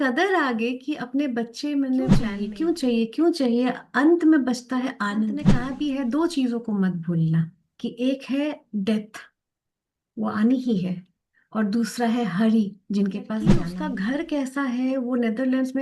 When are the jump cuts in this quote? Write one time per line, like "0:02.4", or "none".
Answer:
0:02.3
0:05.5
0:07.6
0:13.7